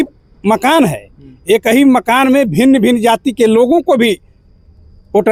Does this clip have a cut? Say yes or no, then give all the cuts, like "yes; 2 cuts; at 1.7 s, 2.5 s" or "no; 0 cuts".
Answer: no; 0 cuts